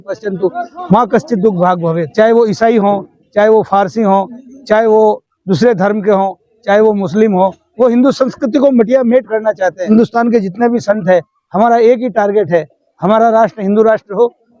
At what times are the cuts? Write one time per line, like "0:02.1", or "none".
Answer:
0:02.0
0:09.9